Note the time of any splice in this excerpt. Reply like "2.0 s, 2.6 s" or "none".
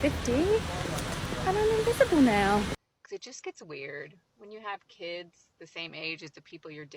2.7 s